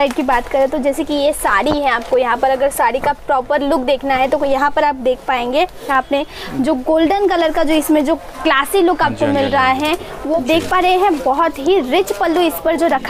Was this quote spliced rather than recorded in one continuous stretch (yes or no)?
yes